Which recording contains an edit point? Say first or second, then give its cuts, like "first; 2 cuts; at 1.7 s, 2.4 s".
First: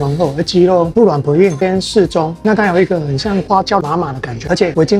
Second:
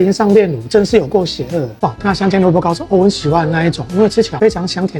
second; 1 cut; at 1.7 s